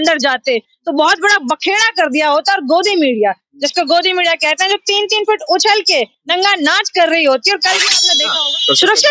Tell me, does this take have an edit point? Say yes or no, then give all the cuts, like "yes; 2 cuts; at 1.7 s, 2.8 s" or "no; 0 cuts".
yes; 1 cut; at 8.0 s